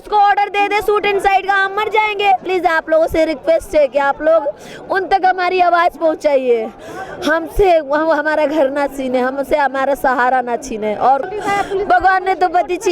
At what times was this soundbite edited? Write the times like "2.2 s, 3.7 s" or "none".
2.4 s, 11.2 s